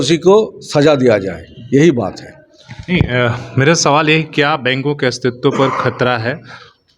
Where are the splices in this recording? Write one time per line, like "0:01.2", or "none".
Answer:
none